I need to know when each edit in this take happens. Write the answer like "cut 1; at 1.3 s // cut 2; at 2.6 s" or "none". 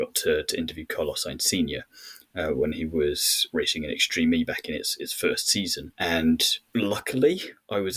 cut 1; at 3.4 s // cut 2; at 5.8 s // cut 3; at 6.6 s